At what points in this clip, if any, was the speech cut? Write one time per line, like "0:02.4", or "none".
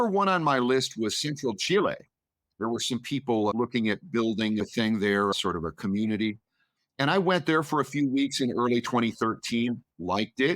0:03.5
0:04.6
0:05.3

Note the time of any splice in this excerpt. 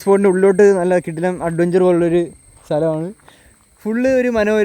none

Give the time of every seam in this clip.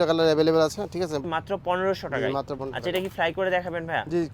none

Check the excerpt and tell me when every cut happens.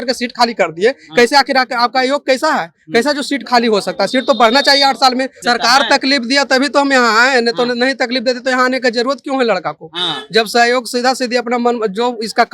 0:05.4

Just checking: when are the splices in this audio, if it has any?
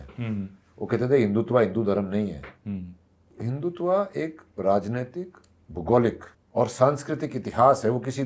0:03.3
0:06.3

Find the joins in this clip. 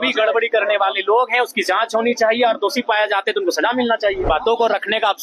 0:04.2

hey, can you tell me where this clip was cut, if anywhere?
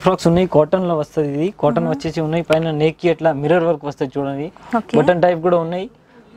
none

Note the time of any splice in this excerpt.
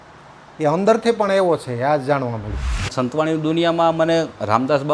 0:02.9

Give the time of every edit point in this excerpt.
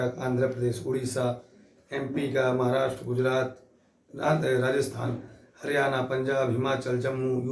none

